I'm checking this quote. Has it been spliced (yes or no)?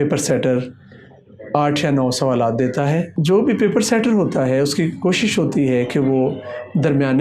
yes